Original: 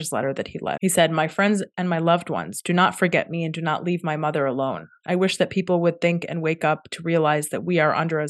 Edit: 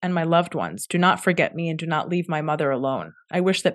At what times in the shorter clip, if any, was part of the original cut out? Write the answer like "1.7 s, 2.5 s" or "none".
none